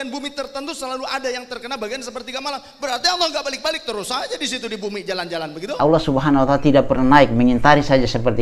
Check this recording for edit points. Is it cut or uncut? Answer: cut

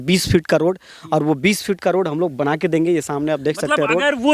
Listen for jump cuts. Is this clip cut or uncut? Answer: uncut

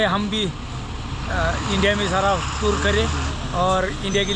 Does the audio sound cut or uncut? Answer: uncut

